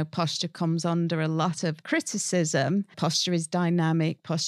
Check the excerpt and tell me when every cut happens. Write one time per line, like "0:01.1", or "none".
0:01.8
0:02.9